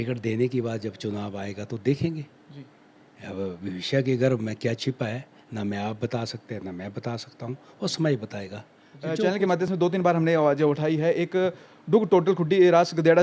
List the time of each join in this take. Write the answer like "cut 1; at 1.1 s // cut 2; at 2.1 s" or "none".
cut 1; at 9.7 s